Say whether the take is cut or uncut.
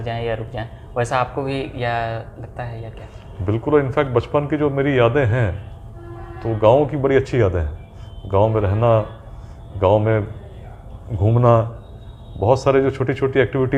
uncut